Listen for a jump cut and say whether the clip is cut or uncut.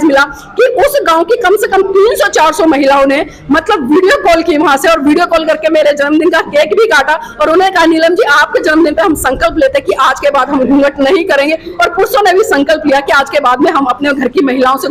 uncut